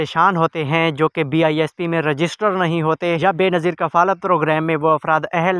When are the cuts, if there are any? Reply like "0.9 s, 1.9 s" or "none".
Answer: 3.2 s